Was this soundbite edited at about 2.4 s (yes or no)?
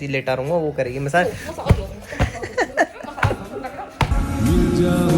no